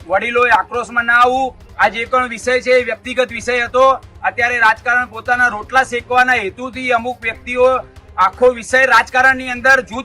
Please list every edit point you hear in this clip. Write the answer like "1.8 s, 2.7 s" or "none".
1.6 s